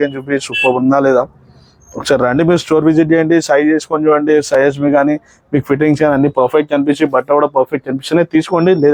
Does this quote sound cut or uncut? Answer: uncut